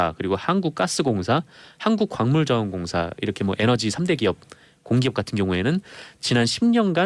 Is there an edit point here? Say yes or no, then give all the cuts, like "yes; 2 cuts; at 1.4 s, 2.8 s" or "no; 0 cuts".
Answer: yes; 1 cut; at 1.4 s